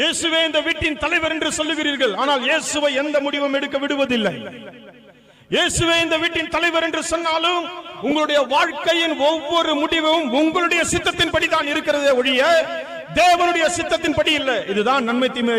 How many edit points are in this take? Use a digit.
1